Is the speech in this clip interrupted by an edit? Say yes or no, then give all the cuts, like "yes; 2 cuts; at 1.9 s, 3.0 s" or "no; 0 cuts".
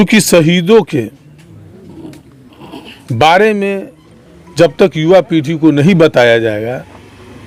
no; 0 cuts